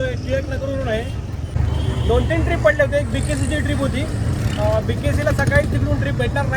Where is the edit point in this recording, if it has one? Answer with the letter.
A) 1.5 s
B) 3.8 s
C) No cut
A